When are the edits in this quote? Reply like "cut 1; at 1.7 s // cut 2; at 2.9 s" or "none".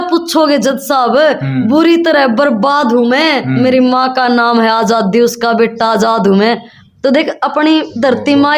none